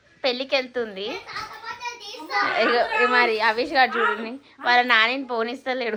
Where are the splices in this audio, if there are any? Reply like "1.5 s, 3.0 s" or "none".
none